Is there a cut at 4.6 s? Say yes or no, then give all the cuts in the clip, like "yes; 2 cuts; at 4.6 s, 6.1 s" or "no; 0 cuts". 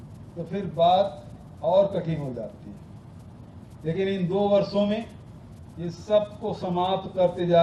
no; 0 cuts